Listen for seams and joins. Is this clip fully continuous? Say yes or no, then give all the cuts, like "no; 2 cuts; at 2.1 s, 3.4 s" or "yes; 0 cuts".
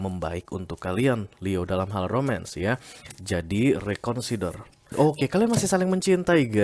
no; 1 cut; at 4.9 s